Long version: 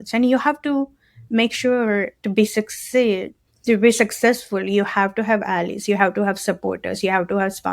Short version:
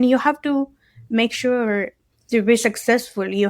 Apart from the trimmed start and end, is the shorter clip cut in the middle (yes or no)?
yes